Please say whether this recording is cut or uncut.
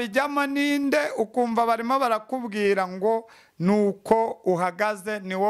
uncut